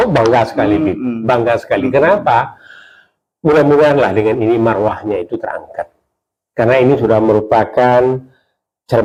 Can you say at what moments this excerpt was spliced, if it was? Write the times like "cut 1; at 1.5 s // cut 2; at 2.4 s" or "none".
none